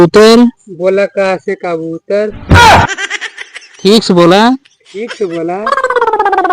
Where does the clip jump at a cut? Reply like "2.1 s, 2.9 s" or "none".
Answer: 5.6 s